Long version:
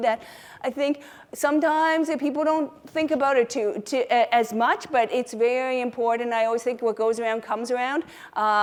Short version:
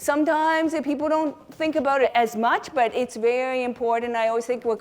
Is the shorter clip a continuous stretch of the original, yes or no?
no